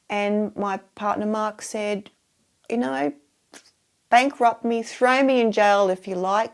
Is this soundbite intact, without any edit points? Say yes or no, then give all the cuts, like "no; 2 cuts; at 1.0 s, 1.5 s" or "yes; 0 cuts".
yes; 0 cuts